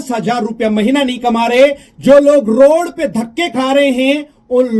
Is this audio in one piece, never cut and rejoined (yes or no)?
yes